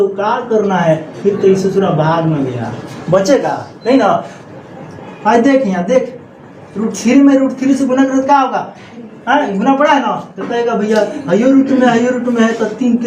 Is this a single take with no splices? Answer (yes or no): no